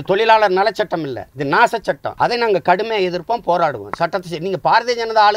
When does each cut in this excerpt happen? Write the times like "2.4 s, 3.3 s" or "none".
1.2 s, 2.1 s